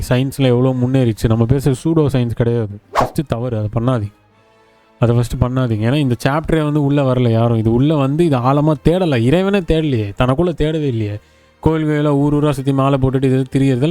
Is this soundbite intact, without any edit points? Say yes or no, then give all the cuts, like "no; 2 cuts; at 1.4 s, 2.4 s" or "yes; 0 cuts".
no; 1 cut; at 3.0 s